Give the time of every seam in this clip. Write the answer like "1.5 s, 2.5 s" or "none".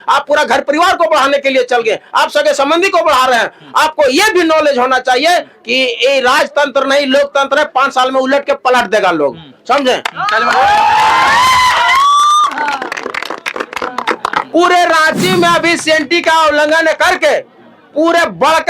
14.5 s